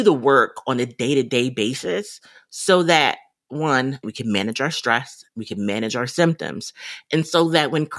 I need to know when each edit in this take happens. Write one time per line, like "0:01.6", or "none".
0:04.1